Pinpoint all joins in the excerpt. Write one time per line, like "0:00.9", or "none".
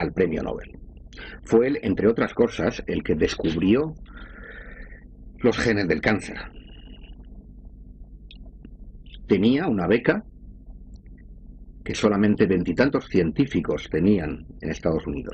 none